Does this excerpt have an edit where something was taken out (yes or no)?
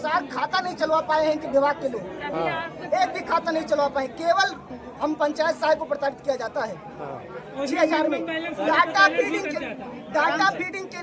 no